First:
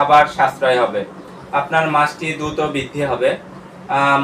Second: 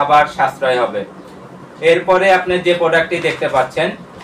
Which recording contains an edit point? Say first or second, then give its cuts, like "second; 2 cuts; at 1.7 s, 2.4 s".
first; 1 cut; at 1.3 s